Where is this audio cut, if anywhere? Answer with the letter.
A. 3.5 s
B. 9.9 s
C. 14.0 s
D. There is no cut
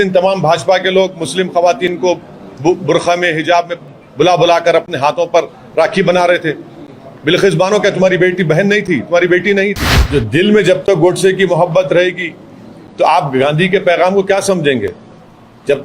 B